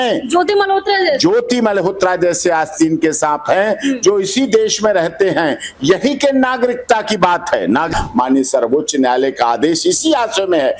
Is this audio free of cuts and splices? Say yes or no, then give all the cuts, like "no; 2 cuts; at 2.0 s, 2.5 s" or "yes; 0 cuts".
no; 1 cut; at 7.9 s